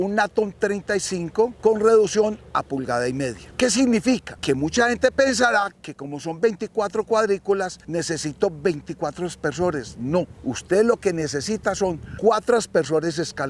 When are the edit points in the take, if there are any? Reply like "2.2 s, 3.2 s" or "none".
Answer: 1.5 s, 4.3 s, 7.8 s, 10.3 s, 12.1 s